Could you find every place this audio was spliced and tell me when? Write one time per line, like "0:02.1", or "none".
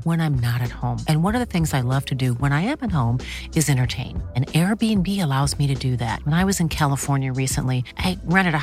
none